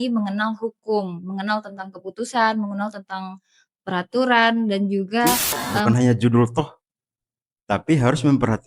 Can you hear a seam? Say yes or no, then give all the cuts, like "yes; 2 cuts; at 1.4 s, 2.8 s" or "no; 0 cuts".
yes; 1 cut; at 5.9 s